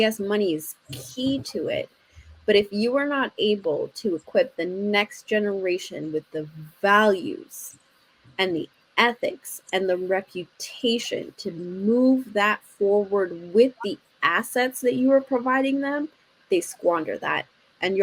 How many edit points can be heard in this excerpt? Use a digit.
0